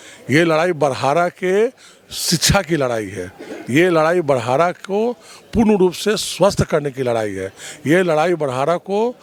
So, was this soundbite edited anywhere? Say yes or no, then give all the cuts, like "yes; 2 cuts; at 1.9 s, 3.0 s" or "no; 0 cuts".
no; 0 cuts